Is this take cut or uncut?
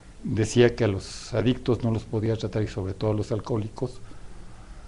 uncut